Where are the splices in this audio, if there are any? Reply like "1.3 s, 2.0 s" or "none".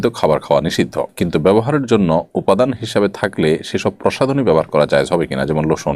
none